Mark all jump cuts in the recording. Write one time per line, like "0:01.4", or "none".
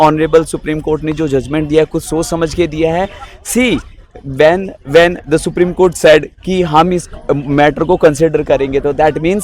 none